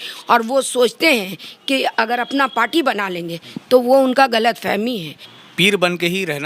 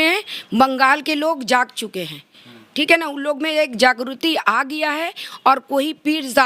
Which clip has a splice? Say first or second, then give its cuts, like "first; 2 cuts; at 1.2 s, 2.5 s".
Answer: first; 1 cut; at 5.4 s